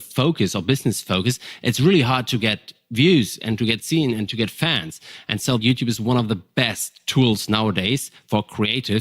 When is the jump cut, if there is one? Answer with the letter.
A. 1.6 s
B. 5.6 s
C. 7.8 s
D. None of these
B